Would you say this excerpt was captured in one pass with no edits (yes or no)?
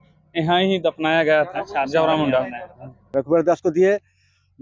no